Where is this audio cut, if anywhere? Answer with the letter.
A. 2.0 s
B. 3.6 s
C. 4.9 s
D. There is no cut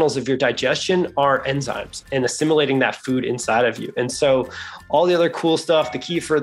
A